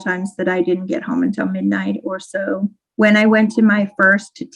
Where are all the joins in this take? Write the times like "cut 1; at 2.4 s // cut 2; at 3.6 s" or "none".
cut 1; at 2.8 s

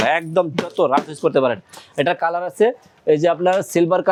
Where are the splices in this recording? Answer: none

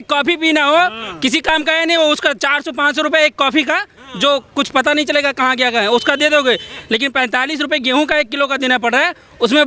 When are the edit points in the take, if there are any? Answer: none

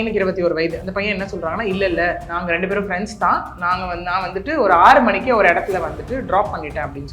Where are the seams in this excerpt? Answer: cut 1; at 0.8 s // cut 2; at 2.3 s

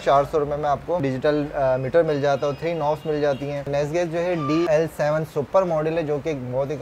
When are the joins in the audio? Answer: cut 1; at 1.0 s // cut 2; at 3.7 s // cut 3; at 4.7 s

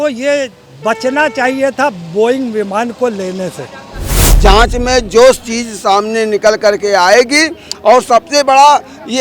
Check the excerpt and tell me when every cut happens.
cut 1; at 4.2 s

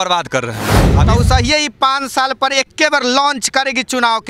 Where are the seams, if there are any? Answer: cut 1; at 0.9 s

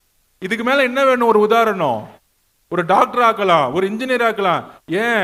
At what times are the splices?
none

